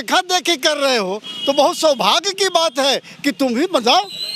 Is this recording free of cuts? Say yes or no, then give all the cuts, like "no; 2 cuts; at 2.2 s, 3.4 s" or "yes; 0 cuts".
yes; 0 cuts